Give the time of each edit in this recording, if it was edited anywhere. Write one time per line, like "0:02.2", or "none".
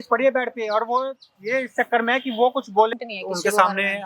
0:02.9